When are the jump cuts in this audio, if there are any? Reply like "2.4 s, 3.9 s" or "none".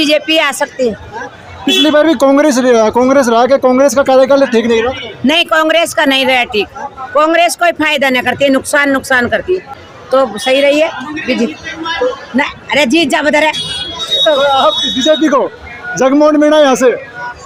none